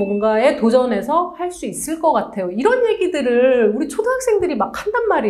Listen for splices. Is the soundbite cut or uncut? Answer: uncut